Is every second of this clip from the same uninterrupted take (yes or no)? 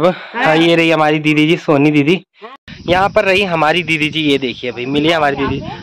no